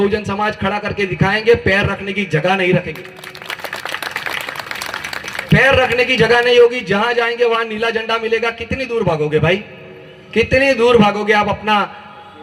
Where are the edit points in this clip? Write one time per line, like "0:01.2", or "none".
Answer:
none